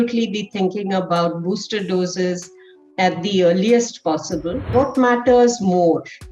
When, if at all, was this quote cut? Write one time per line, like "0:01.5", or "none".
0:04.7